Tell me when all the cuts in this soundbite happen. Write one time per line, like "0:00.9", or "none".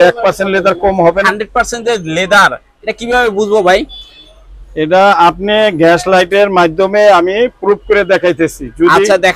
0:01.2